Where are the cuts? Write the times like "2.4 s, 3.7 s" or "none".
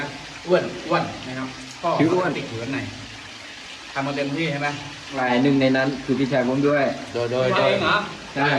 5.2 s